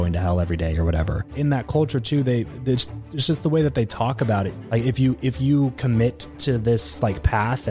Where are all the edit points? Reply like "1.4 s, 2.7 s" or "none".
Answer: 1.3 s

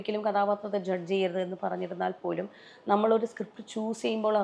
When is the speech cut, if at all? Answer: none

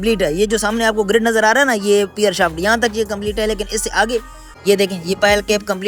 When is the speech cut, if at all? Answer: 4.5 s

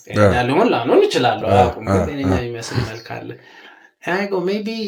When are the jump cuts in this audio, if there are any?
none

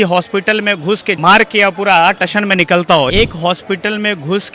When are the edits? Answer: 1.2 s, 3.1 s

